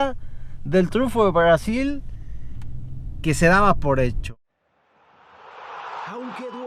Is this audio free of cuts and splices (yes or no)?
no